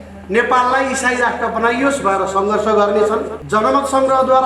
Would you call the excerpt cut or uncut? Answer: cut